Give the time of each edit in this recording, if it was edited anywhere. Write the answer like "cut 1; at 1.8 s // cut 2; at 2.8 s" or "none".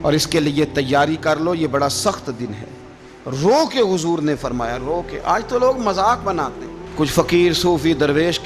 none